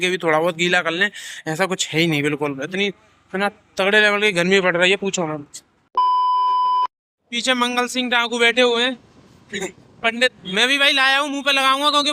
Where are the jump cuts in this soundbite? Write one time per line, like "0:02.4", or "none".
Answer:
0:05.9
0:07.0